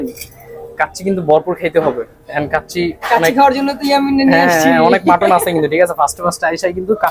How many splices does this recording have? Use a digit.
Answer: 0